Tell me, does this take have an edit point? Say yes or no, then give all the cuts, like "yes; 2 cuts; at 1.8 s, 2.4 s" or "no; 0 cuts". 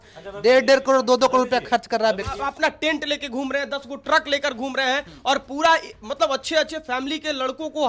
yes; 1 cut; at 2.4 s